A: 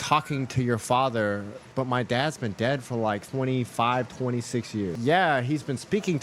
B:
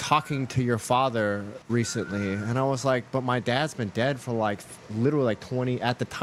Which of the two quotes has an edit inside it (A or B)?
A